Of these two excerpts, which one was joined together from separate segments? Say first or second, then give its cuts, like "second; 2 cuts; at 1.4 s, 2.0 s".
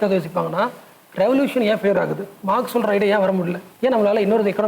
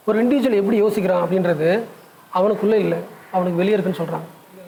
first; 2 cuts; at 2.3 s, 3.6 s